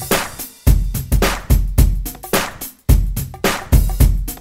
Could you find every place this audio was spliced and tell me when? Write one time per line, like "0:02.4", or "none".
none